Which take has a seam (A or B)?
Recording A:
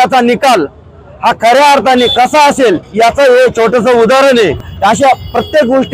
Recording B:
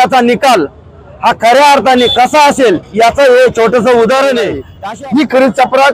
B